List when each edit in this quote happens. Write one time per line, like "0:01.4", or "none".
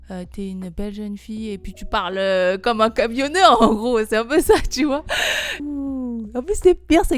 0:05.6